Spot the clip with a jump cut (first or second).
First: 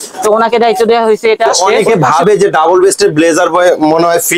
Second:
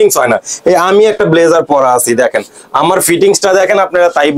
first